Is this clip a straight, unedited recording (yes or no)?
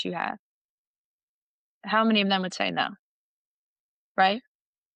yes